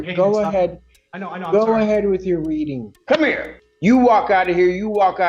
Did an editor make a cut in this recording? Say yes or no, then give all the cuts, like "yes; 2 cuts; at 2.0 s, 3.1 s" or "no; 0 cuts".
yes; 1 cut; at 2.9 s